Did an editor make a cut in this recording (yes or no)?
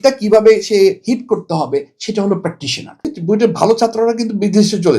yes